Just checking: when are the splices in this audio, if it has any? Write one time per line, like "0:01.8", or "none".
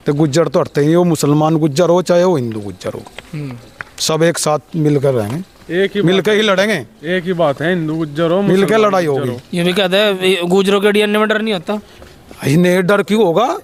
none